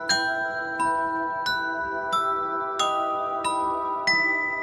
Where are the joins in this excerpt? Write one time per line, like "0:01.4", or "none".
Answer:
none